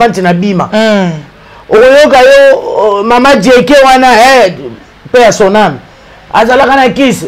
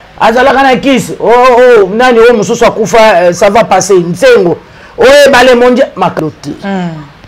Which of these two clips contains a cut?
second; 1 cut; at 6.1 s

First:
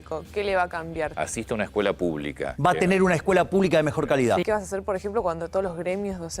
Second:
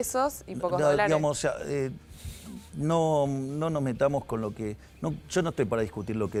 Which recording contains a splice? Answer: first; 3 cuts; at 1.1 s, 2.5 s, 4.4 s

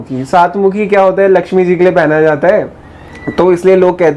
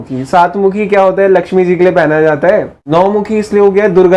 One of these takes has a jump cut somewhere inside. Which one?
second; 1 cut; at 2.8 s

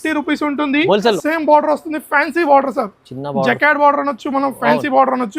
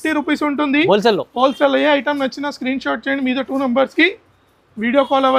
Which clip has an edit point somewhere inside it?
first; 1 cut; at 1.2 s

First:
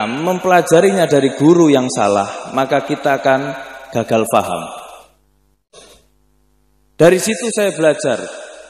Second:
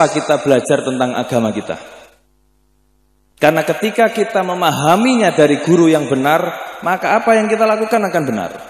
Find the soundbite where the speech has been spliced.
first; 1 cut; at 5.7 s

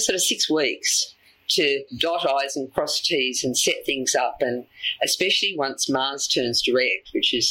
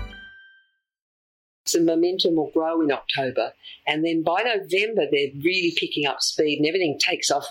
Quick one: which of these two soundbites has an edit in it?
second; 1 cut; at 1.0 s

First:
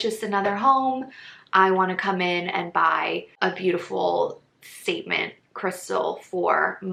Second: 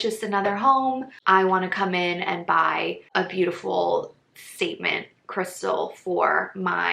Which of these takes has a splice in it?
second; 1 cut; at 1.1 s

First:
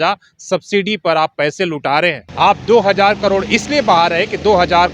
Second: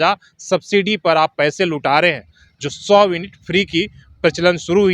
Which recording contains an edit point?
first; 1 cut; at 2.2 s

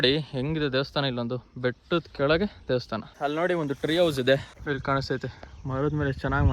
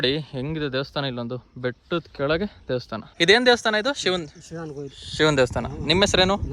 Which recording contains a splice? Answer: first; 2 cuts; at 3.1 s, 4.5 s

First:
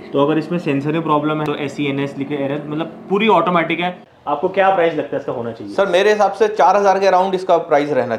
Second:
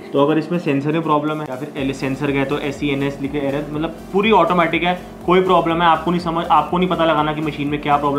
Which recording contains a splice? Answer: first; 2 cuts; at 1.5 s, 4.1 s

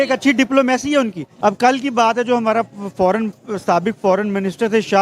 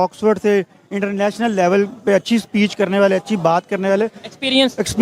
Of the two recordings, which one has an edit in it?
first; 1 cut; at 1.2 s

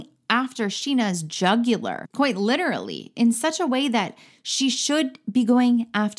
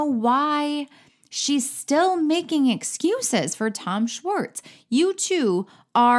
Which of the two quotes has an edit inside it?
first; 1 cut; at 2.0 s

